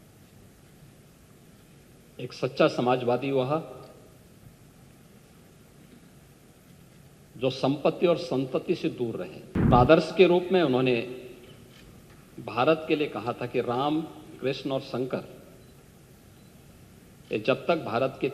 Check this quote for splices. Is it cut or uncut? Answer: cut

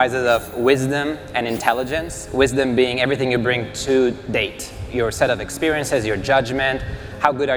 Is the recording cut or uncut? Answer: uncut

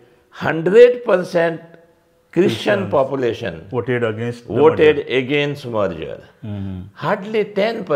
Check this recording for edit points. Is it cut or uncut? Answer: uncut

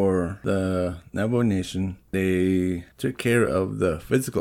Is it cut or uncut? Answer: cut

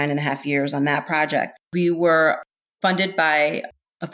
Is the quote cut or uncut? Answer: cut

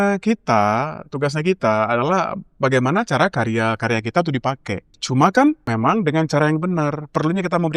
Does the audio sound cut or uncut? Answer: cut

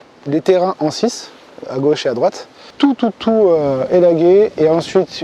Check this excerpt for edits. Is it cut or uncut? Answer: cut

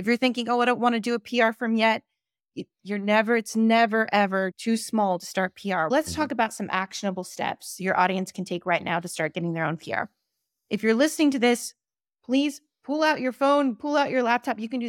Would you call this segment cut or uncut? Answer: cut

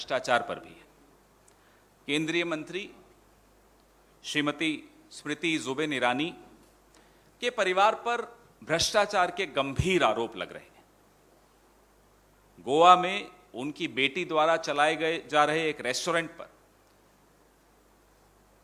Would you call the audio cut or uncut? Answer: uncut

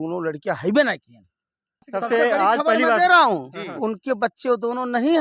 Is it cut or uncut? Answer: cut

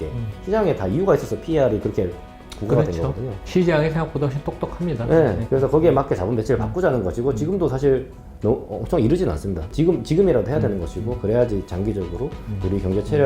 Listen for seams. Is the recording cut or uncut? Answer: cut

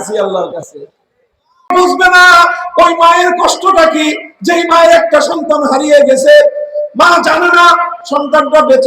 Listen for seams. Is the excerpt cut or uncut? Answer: cut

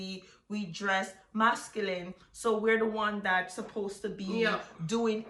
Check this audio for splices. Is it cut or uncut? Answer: uncut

